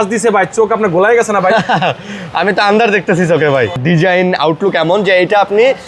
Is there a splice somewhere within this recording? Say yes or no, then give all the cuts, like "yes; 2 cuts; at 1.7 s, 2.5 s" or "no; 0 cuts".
yes; 1 cut; at 3.8 s